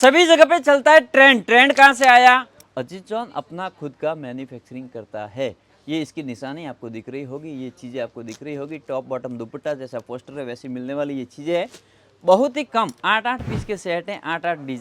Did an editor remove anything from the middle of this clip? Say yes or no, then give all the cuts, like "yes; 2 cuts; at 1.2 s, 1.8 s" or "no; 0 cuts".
yes; 1 cut; at 2.6 s